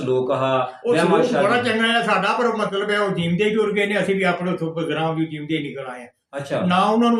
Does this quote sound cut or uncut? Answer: uncut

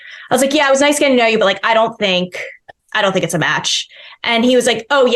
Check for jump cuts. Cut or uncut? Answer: uncut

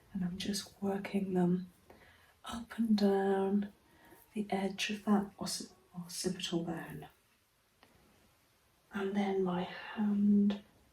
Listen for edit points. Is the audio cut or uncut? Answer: cut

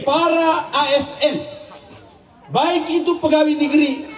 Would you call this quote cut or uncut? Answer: uncut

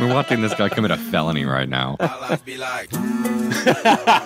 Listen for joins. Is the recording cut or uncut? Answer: cut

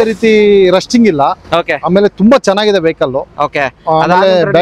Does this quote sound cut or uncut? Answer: uncut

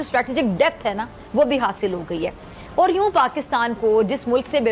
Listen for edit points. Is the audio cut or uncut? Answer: uncut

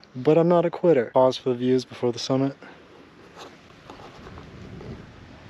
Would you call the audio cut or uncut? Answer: cut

